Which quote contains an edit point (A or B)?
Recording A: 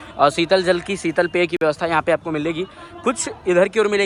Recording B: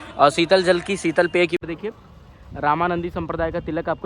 B